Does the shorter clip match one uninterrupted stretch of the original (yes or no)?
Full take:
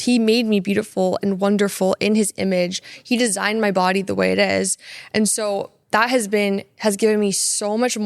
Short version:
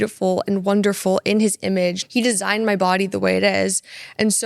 no